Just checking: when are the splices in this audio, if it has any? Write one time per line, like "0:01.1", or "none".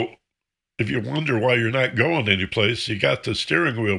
none